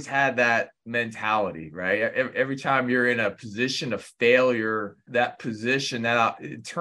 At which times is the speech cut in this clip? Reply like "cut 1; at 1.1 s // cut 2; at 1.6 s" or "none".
cut 1; at 5.0 s